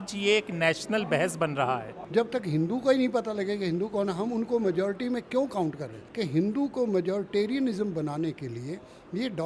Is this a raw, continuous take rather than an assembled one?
no; 2 cuts; at 1.9 s, 6.0 s

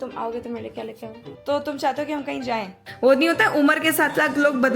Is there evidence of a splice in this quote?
yes; 2 cuts; at 1.1 s, 2.8 s

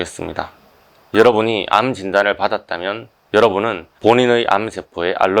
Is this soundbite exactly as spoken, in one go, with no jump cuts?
no; 1 cut; at 1.0 s

